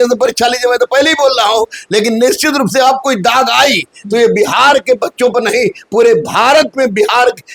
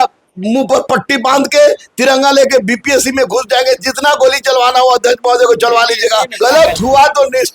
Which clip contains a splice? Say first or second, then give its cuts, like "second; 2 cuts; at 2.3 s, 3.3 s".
second; 1 cut; at 6.3 s